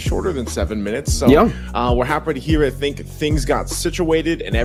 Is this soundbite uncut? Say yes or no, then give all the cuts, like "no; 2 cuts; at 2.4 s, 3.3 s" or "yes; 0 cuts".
yes; 0 cuts